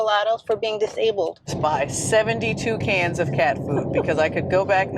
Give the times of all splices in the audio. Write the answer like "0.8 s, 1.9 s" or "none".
1.5 s